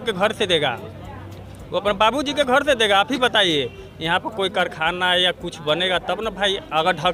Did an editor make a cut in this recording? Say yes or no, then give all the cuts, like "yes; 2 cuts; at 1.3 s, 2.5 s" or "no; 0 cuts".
no; 0 cuts